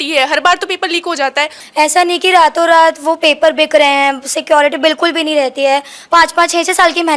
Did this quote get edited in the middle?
yes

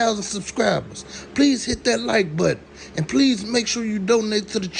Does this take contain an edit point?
no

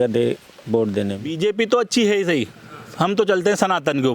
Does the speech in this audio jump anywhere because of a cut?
yes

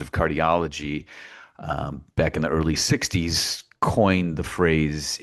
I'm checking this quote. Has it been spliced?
no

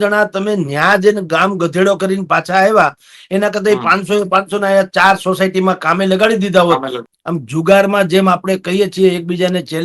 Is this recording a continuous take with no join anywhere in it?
no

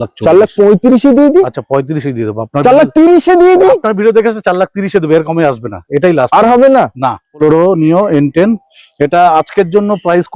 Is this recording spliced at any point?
yes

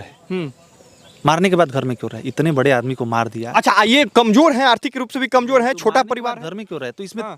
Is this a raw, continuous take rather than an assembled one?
yes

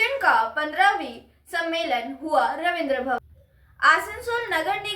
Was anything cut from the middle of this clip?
yes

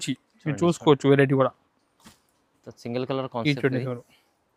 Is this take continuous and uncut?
yes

